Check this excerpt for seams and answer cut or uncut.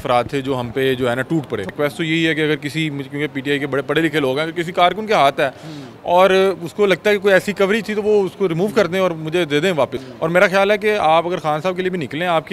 cut